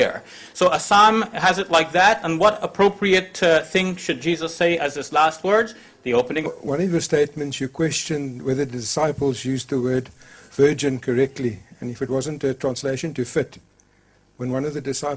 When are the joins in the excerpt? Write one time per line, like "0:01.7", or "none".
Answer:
none